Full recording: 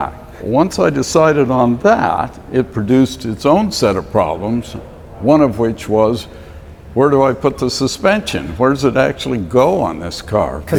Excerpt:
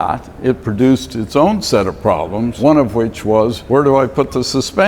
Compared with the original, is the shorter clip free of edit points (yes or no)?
no